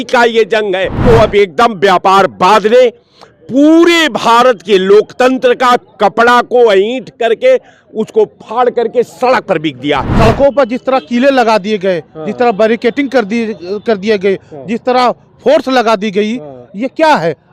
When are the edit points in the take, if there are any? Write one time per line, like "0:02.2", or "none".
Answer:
0:00.9
0:10.1